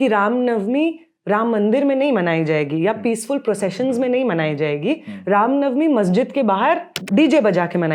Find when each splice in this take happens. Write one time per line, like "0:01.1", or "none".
0:06.9